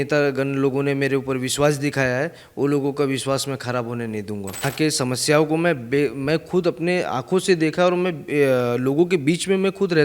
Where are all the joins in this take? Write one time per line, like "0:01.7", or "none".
0:04.7